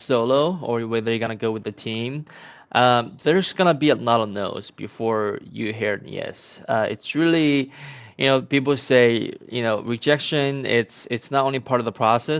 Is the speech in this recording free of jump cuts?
yes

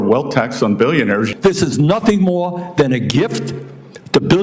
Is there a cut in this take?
yes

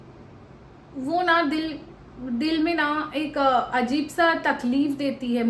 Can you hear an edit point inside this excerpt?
no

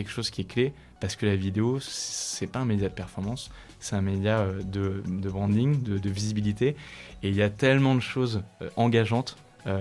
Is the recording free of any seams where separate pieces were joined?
yes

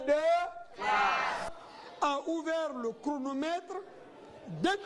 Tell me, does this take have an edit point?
no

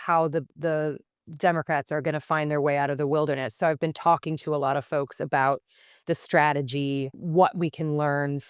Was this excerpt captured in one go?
no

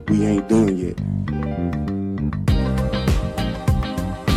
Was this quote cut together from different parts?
no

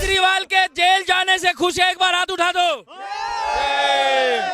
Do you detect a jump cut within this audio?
no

